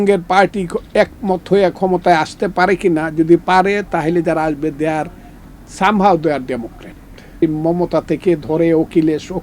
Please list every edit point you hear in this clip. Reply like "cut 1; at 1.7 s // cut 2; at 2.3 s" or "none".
cut 1; at 7.3 s